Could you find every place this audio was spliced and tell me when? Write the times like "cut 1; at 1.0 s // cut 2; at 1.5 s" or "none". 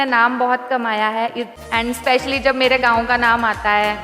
cut 1; at 1.5 s